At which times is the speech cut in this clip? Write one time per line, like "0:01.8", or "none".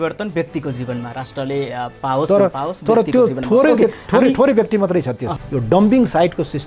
0:05.2